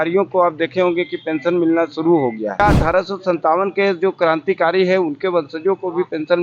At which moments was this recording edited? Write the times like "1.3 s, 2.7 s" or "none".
2.6 s